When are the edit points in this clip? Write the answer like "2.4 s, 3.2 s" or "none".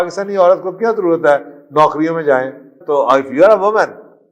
2.8 s